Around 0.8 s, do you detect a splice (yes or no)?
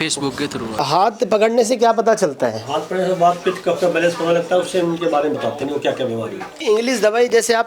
yes